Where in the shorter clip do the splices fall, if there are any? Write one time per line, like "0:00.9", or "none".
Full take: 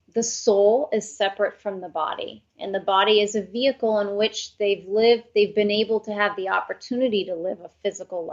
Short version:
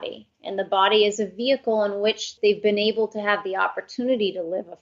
0:02.3